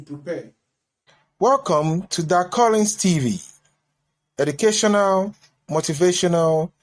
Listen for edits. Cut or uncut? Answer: cut